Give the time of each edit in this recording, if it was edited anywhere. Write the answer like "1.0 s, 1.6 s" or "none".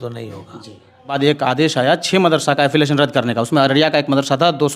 1.1 s